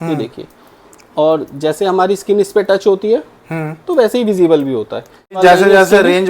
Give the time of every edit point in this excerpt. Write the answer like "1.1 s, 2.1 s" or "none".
5.4 s